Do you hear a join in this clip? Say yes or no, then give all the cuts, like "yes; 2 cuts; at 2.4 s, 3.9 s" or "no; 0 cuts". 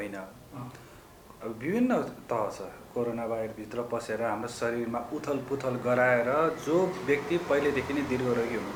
no; 0 cuts